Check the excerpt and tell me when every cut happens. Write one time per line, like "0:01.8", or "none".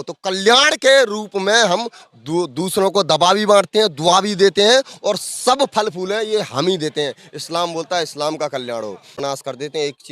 0:09.2